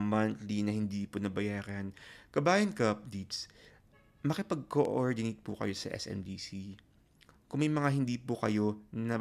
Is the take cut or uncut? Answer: uncut